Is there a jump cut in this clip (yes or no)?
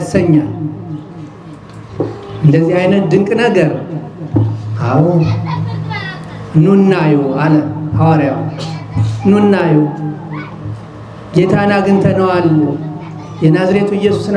no